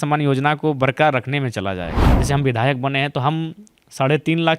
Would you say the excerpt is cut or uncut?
cut